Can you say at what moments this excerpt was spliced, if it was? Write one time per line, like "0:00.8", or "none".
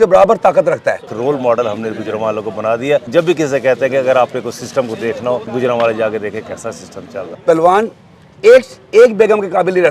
0:01.1
0:03.1
0:05.5
0:07.3